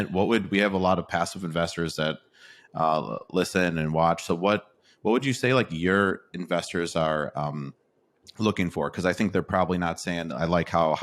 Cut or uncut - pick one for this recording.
uncut